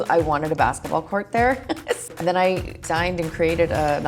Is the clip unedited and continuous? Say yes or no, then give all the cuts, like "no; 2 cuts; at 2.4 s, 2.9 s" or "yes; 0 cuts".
no; 2 cuts; at 2.0 s, 2.8 s